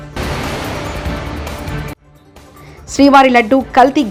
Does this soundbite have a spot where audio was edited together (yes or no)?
no